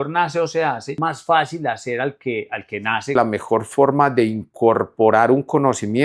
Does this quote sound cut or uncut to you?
cut